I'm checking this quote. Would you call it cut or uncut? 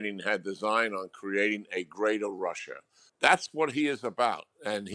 cut